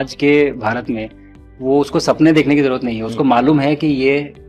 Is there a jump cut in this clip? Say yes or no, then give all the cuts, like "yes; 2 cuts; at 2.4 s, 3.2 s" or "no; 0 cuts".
no; 0 cuts